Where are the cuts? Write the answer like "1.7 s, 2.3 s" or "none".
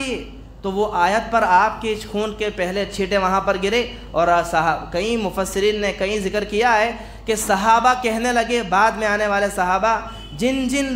none